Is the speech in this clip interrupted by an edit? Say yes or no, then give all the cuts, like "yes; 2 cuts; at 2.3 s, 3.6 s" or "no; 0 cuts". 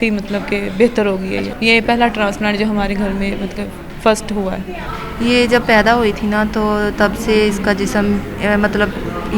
yes; 2 cuts; at 1.5 s, 4.8 s